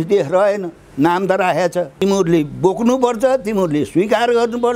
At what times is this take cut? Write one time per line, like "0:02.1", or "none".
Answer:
0:02.0